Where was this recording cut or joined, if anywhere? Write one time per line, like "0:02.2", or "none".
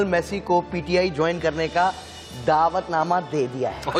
none